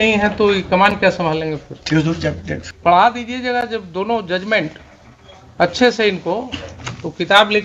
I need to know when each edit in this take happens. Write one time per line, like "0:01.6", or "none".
0:02.6